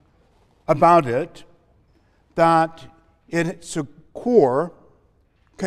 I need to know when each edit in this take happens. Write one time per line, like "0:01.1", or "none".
none